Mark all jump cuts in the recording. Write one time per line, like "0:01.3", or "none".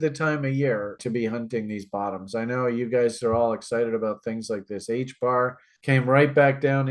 0:01.0